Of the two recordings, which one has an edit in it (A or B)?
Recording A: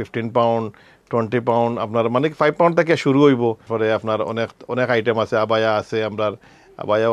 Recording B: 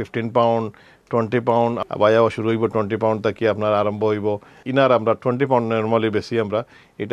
B